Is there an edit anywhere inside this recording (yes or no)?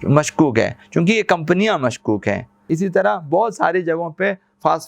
yes